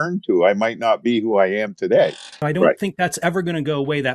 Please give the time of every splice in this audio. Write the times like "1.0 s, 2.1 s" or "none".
2.4 s